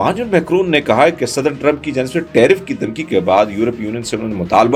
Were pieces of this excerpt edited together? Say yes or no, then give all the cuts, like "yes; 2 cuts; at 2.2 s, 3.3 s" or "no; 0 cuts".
no; 0 cuts